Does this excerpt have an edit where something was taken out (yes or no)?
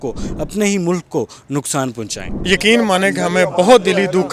yes